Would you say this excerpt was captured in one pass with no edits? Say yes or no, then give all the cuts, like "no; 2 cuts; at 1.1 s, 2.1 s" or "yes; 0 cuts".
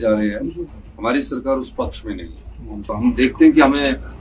no; 1 cut; at 2.9 s